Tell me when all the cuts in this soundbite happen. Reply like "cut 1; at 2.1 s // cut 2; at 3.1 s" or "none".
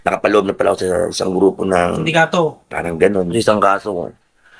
cut 1; at 3.3 s

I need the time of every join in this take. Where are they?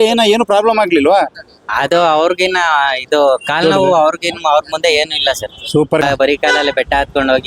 cut 1; at 6.0 s

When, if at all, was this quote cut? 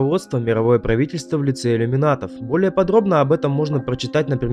none

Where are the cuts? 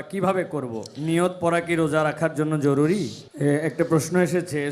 cut 1; at 3.2 s

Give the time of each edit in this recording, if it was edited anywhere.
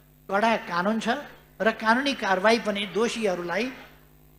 none

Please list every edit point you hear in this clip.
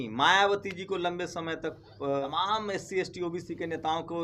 cut 1; at 2.2 s

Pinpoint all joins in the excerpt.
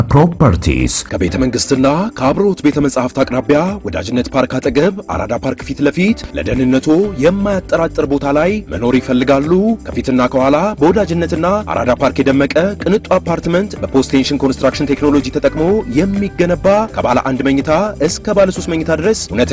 cut 1; at 1.0 s

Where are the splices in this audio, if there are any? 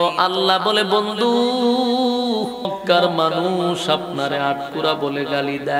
cut 1; at 2.7 s

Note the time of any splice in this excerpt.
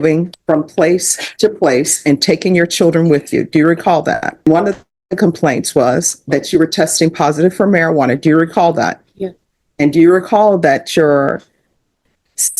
cut 1; at 4.5 s

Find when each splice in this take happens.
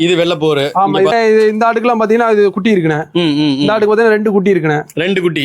cut 1; at 1.1 s

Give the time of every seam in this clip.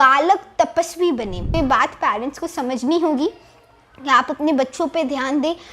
cut 1; at 1.4 s

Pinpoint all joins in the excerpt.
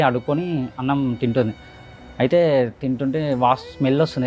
none

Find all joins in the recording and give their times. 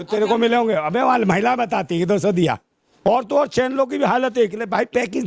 cut 1; at 2.8 s

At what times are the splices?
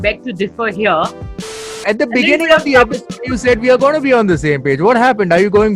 cut 1; at 1.6 s

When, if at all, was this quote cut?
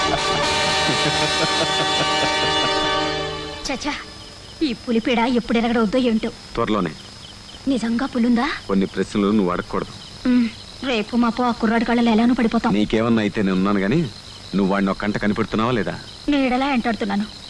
none

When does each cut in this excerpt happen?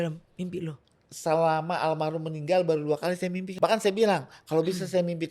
cut 1; at 3.5 s

